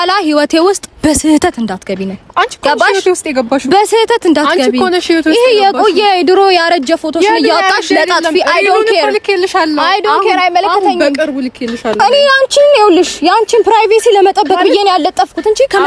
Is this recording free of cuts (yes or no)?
no